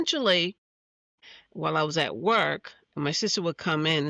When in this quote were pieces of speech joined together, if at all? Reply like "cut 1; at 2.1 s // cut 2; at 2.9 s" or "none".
cut 1; at 1.3 s